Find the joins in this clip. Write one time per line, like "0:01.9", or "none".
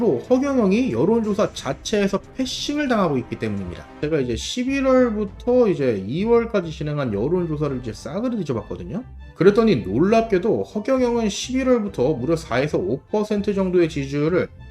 0:04.0